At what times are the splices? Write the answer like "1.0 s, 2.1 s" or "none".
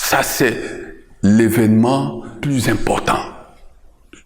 2.4 s